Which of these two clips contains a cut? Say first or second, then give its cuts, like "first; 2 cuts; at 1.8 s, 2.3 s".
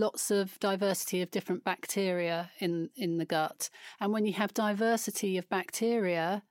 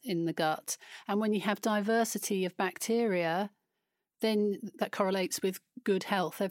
second; 1 cut; at 4.7 s